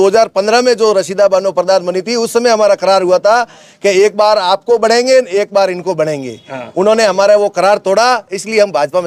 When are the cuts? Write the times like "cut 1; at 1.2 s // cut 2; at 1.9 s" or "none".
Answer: none